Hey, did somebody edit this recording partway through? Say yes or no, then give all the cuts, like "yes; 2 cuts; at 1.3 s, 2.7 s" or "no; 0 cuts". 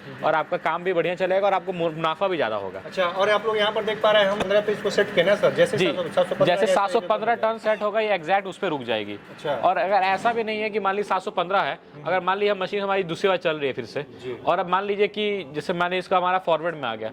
no; 0 cuts